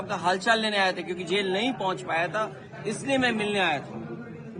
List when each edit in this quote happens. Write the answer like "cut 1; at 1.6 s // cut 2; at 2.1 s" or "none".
none